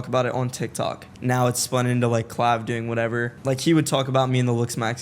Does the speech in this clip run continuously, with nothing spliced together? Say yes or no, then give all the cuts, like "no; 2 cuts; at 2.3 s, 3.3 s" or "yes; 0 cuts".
no; 2 cuts; at 1.1 s, 3.3 s